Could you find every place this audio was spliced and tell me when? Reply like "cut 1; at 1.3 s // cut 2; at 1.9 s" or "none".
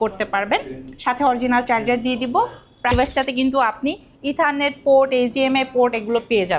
cut 1; at 2.9 s